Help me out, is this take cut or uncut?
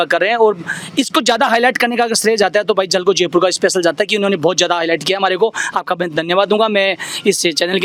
uncut